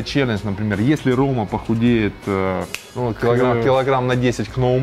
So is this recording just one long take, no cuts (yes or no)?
yes